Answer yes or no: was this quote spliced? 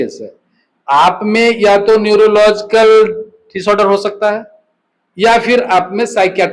no